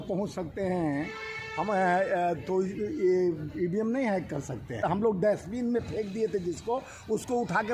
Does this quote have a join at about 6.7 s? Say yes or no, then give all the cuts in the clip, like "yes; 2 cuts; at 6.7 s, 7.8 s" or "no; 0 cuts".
no; 1 cut; at 4.8 s